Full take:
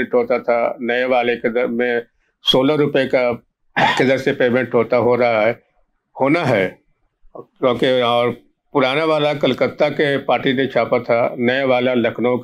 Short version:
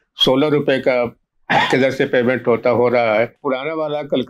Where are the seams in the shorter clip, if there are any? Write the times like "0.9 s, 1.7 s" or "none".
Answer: 3.4 s